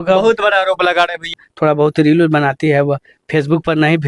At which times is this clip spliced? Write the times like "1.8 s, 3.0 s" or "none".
1.3 s